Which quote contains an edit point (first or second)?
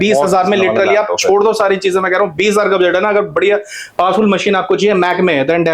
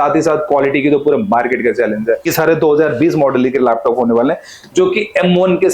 second